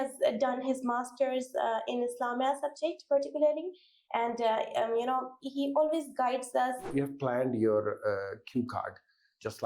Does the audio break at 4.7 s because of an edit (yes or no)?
no